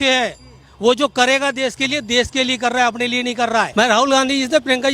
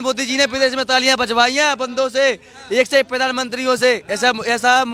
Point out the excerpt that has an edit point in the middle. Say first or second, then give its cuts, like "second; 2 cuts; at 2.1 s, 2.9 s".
first; 1 cut; at 3.7 s